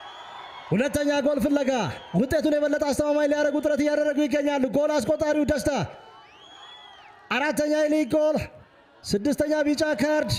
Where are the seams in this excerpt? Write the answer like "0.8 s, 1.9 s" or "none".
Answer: none